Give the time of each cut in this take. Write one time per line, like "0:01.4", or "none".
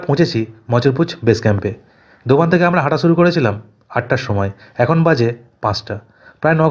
none